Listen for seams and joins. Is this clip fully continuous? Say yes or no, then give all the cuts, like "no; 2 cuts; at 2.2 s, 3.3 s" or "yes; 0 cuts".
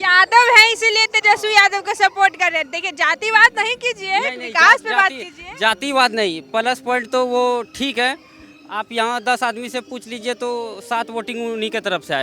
yes; 0 cuts